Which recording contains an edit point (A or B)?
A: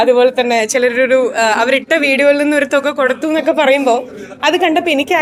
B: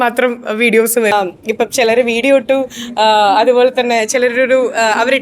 B